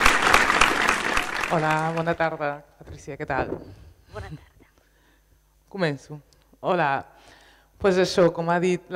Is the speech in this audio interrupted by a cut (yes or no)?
no